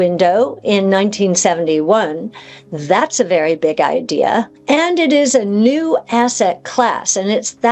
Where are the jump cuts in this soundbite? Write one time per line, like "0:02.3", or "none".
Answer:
0:04.5